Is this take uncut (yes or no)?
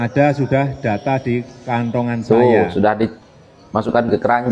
no